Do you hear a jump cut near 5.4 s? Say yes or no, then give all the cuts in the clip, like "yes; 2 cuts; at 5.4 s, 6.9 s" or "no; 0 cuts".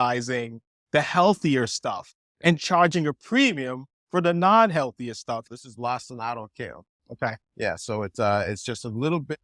yes; 1 cut; at 5.4 s